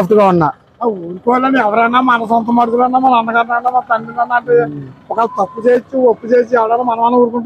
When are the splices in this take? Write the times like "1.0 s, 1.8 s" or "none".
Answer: none